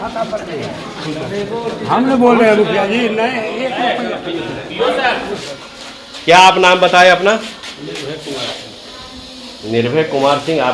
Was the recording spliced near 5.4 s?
yes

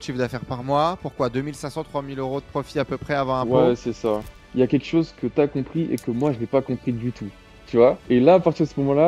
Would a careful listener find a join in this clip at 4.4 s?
yes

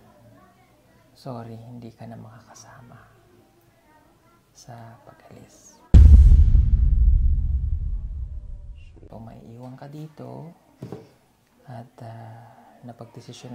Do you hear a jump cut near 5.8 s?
yes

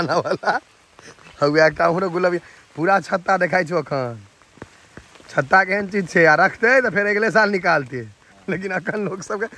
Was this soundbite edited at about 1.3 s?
no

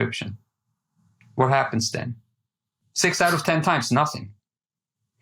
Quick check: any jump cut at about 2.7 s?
yes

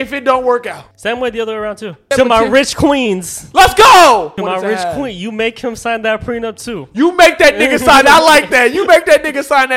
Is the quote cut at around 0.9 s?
yes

